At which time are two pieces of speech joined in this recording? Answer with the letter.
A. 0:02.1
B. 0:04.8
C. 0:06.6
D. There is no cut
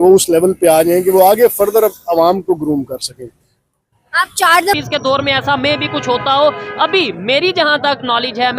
B